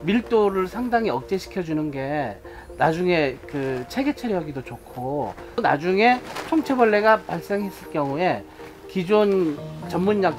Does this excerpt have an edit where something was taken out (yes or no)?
yes